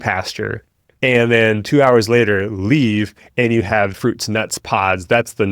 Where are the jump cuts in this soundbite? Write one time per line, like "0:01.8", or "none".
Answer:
0:03.9